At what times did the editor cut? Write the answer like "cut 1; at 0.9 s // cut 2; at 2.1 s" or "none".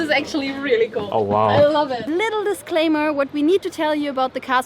cut 1; at 1.1 s // cut 2; at 2.0 s